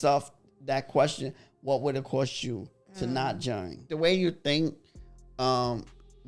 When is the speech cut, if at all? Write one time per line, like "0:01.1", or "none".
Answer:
0:03.9